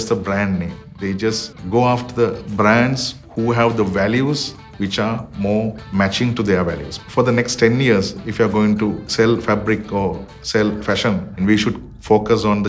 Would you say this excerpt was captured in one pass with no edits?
no; 4 cuts; at 1.5 s, 5.8 s, 6.9 s, 11.4 s

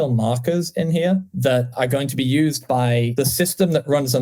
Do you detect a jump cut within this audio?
yes; 2 cuts; at 1.7 s, 3.1 s

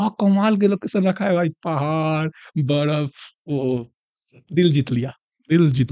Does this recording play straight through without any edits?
yes; 0 cuts

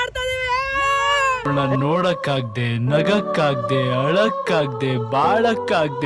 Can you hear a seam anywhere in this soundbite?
no; 0 cuts

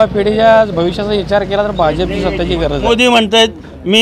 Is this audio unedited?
no; 1 cut; at 2.8 s

